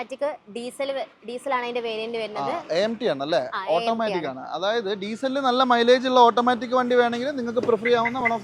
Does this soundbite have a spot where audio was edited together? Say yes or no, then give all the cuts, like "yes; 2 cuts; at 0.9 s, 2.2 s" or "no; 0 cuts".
no; 0 cuts